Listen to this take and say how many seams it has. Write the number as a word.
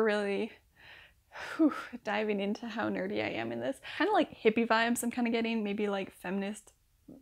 one